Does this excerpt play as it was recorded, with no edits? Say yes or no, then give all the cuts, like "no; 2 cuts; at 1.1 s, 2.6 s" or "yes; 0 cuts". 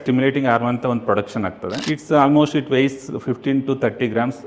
no; 1 cut; at 1.7 s